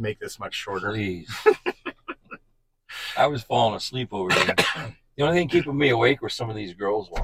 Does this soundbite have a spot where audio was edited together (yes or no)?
no